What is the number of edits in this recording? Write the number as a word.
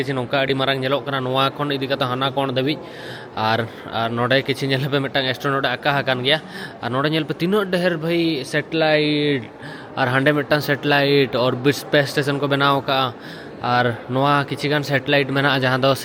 zero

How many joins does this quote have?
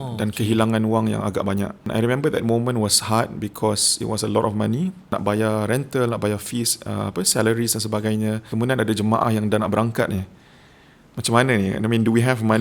three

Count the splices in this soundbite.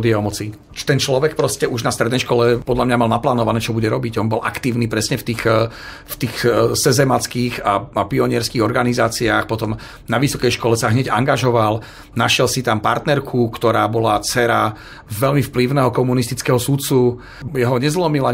zero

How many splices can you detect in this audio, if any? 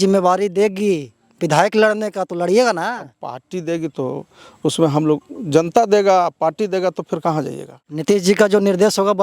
one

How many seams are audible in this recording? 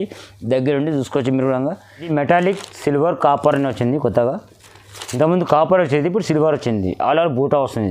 one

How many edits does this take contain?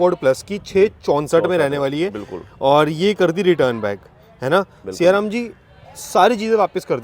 zero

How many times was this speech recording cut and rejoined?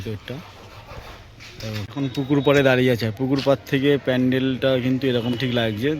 one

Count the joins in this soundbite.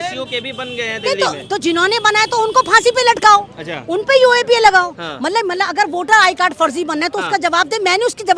zero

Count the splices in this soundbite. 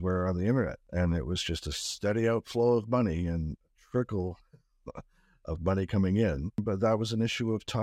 two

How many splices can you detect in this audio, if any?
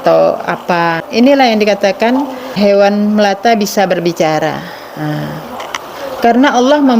three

